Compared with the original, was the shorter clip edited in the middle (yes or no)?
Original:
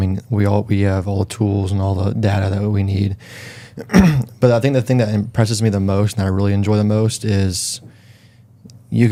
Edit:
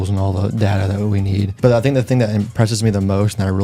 yes